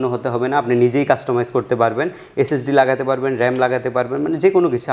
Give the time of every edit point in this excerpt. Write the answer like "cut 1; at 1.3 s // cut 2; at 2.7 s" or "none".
none